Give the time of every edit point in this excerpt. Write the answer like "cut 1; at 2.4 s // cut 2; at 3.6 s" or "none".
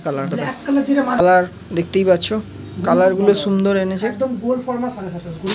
cut 1; at 1.2 s

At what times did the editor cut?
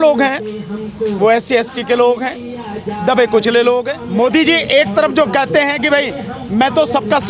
cut 1; at 4.0 s

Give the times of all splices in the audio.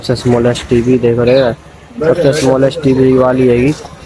none

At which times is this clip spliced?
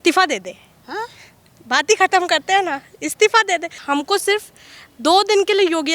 cut 1; at 3.8 s

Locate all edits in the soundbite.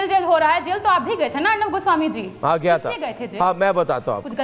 cut 1; at 3.2 s

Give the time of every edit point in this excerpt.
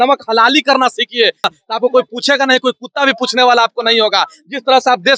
cut 1; at 1.5 s

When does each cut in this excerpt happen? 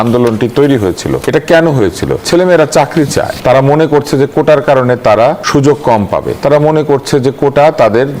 cut 1; at 1.2 s // cut 2; at 2.2 s // cut 3; at 3.3 s // cut 4; at 5.4 s // cut 5; at 6.3 s

